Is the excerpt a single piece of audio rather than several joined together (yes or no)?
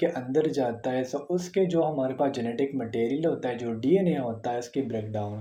yes